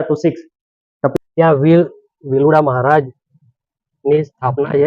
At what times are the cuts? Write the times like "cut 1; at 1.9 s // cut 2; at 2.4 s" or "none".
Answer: cut 1; at 1.1 s